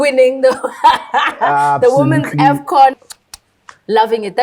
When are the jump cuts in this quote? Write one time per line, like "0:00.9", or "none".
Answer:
0:03.0